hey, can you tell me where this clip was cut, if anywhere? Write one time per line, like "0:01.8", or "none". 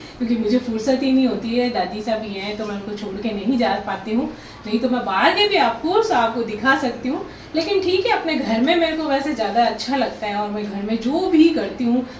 none